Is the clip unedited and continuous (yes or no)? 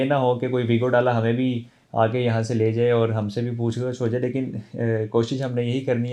yes